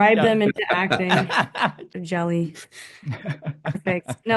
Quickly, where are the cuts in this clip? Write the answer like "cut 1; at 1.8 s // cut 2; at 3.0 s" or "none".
cut 1; at 1.9 s

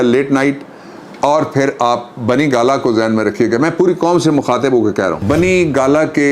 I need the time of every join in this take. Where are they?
cut 1; at 5.2 s

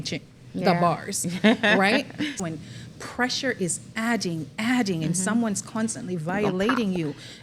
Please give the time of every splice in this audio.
cut 1; at 2.4 s

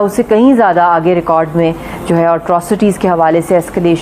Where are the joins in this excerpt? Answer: none

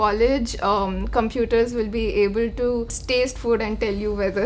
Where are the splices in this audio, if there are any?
cut 1; at 3.0 s

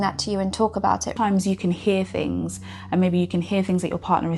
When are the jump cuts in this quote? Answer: cut 1; at 1.1 s

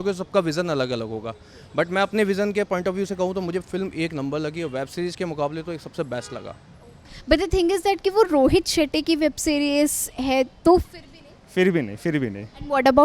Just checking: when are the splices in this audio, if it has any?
none

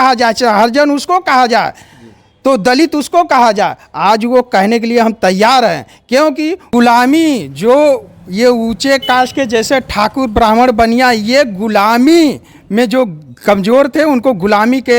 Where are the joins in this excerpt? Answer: cut 1; at 6.7 s

